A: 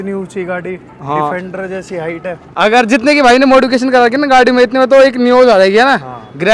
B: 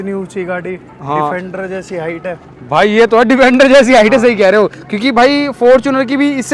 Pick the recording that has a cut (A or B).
A